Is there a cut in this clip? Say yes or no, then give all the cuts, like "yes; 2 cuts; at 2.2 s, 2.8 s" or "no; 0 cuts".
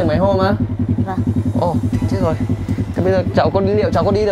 no; 0 cuts